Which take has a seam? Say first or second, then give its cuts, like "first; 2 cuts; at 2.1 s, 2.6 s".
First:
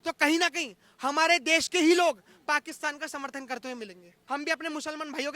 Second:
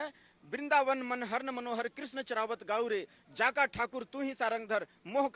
first; 1 cut; at 4.1 s